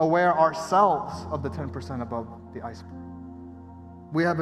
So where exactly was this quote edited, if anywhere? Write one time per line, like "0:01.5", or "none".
none

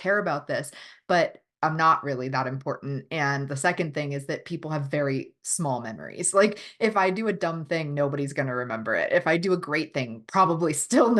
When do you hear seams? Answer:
none

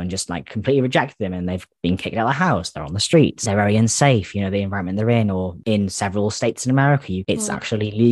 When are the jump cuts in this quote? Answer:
0:03.4
0:05.5
0:07.2

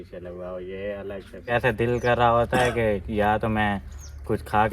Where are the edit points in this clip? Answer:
0:01.5

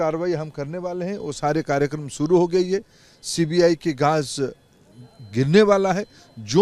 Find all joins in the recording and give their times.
none

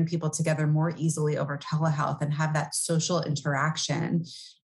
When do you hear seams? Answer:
none

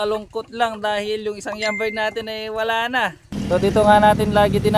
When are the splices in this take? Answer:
0:03.2

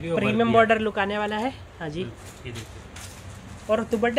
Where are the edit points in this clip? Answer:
none

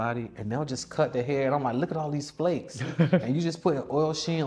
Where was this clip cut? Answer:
none

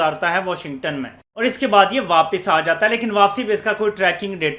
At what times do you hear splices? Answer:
none

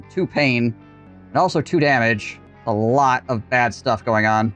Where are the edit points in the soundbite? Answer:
none

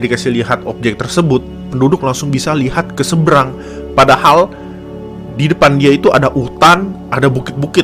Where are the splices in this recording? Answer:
none

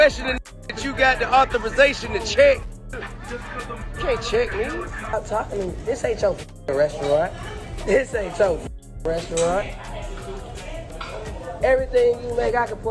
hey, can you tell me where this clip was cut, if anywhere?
0:05.1

